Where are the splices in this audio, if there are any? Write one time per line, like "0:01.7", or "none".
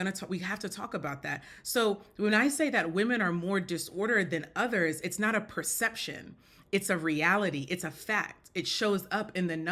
none